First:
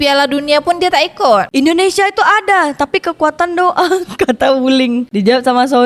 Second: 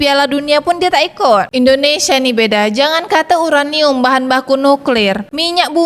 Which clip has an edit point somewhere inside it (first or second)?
second